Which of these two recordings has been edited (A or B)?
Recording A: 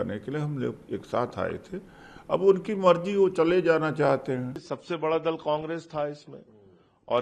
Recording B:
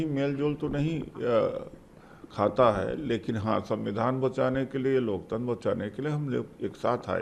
A